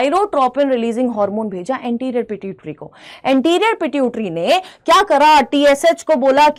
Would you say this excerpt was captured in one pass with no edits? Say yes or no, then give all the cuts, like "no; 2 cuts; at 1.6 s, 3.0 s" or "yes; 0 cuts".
yes; 0 cuts